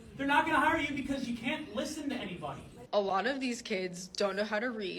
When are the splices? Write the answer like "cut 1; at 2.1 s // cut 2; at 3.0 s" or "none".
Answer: cut 1; at 2.7 s